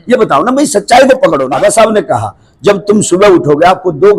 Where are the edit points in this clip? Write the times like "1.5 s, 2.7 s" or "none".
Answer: 1.4 s

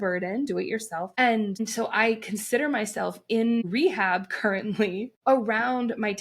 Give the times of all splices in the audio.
1.1 s, 1.6 s, 3.6 s, 5.1 s

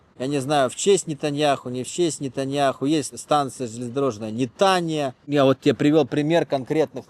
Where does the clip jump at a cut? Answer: 5.2 s

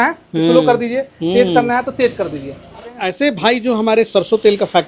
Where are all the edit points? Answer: 3.1 s

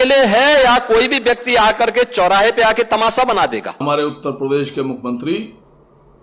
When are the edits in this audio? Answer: 3.8 s

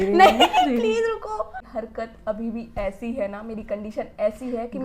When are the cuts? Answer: 1.7 s

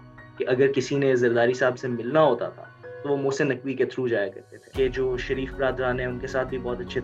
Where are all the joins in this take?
4.7 s

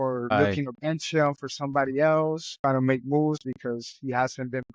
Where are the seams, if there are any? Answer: 2.5 s

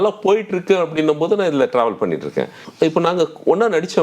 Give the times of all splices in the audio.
2.6 s

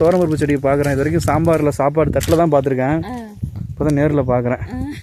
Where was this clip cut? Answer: none

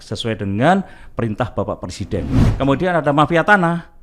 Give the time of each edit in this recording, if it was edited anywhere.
2.5 s

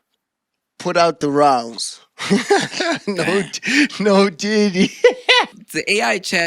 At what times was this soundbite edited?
5.6 s

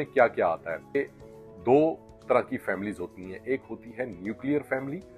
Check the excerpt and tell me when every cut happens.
0.9 s

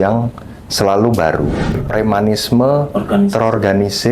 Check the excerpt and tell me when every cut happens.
1.7 s

